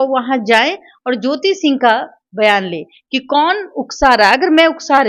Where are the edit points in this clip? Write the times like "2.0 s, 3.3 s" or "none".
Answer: none